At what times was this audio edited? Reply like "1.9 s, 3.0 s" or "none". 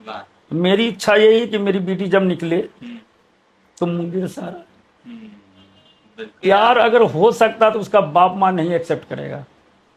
6.4 s